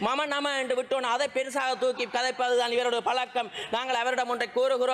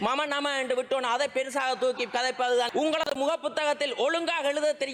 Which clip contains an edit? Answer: second; 1 cut; at 2.7 s

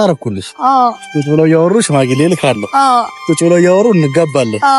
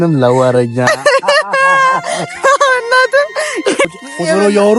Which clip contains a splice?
second; 1 cut; at 3.9 s

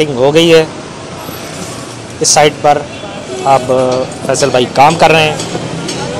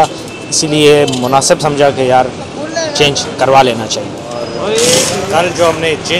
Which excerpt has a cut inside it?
second; 1 cut; at 4.3 s

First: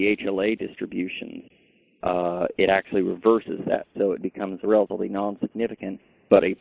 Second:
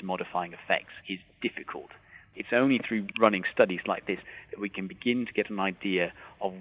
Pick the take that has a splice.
second; 4 cuts; at 0.9 s, 2.2 s, 3.1 s, 4.2 s

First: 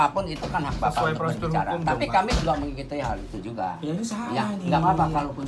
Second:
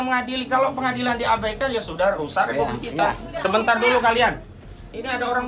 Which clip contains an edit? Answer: second; 1 cut; at 3.4 s

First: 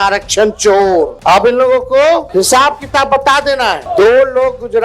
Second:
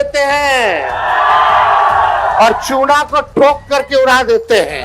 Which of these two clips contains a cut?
first; 3 cuts; at 1.2 s, 2.3 s, 3.8 s

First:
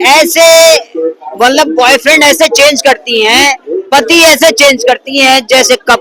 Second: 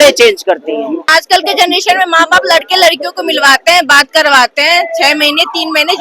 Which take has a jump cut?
second; 1 cut; at 1.0 s

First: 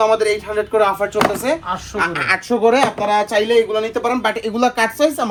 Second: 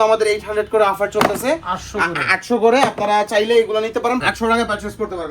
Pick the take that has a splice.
second; 1 cut; at 4.2 s

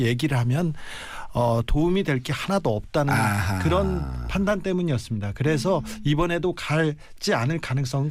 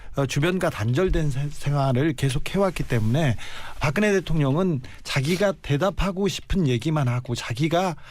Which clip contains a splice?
second; 1 cut; at 2.7 s

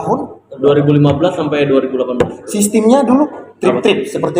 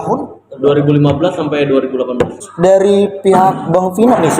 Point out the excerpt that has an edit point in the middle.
second; 1 cut; at 2.4 s

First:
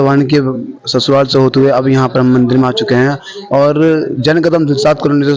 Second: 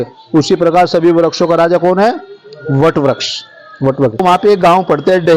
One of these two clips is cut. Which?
second; 1 cut; at 4.2 s

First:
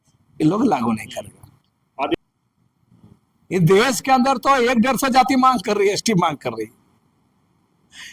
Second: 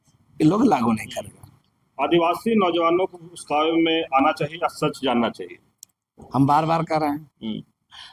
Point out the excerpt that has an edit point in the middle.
first; 1 cut; at 2.1 s

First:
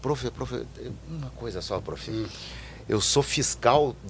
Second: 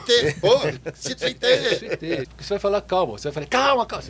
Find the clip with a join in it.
second; 1 cut; at 2.3 s

